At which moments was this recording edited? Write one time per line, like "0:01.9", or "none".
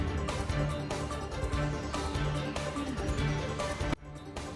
none